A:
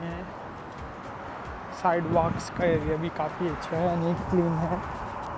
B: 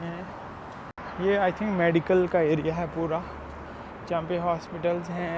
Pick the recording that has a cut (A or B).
B